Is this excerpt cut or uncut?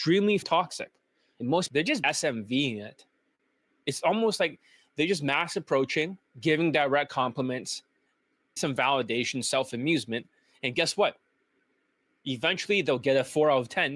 cut